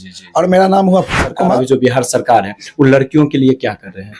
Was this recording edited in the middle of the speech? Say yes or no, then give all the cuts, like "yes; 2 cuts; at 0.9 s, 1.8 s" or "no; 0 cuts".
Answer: yes; 1 cut; at 1.6 s